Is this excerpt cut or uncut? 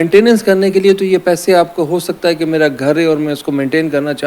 uncut